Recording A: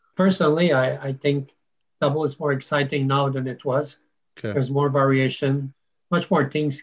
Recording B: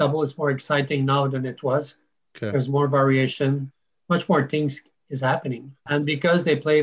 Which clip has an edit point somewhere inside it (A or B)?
B